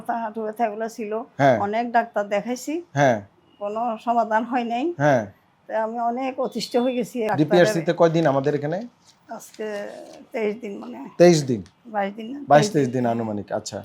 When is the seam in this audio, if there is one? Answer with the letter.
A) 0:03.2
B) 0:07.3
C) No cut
B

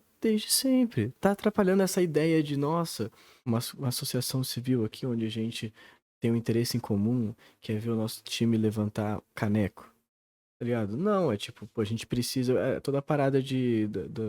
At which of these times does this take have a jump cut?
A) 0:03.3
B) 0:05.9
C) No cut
A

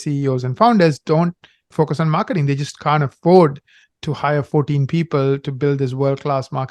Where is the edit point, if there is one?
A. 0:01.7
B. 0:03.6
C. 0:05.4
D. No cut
A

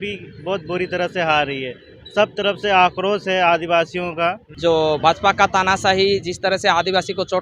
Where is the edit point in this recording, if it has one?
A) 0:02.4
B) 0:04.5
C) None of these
B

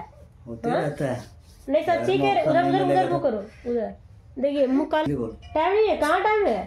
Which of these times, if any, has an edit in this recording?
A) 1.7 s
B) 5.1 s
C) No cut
B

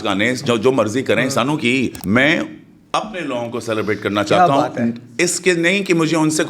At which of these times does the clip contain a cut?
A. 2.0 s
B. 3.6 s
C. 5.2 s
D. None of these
A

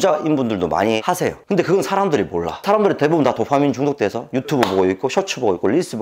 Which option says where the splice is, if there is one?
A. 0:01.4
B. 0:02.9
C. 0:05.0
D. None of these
A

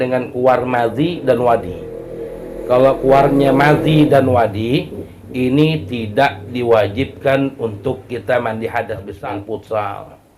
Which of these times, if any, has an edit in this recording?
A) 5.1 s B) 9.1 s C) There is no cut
B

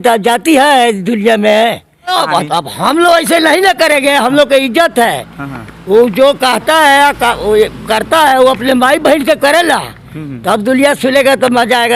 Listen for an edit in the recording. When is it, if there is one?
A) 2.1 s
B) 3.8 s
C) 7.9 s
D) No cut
A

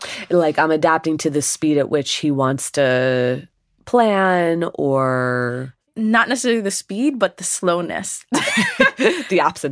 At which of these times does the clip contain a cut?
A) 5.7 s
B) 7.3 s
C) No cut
A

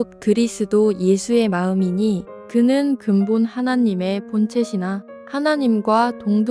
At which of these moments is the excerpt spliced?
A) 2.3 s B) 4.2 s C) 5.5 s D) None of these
A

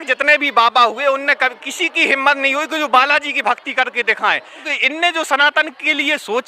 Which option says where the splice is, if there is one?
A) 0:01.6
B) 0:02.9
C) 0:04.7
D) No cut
C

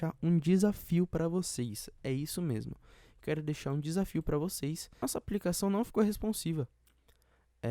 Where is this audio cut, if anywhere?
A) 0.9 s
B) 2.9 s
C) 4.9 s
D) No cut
C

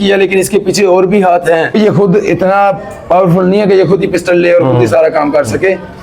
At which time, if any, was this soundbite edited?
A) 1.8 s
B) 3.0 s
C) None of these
A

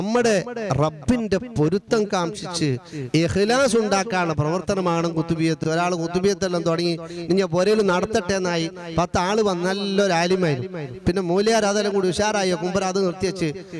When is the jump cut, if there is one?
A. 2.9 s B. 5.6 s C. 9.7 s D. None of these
D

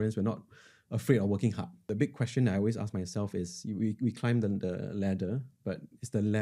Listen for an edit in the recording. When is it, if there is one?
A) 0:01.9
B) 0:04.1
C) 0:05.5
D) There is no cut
A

